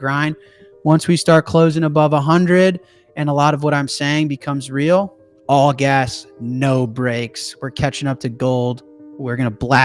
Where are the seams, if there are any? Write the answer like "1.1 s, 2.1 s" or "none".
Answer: 5.3 s